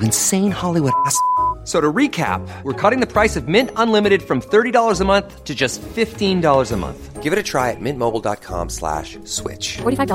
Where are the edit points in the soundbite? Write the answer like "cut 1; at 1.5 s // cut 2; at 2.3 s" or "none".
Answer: none